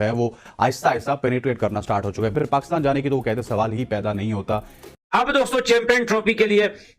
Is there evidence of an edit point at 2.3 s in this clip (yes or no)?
yes